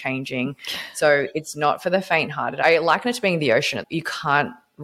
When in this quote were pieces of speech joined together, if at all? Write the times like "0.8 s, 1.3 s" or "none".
2.6 s, 3.8 s